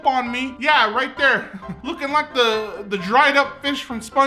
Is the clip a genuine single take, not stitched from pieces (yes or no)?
no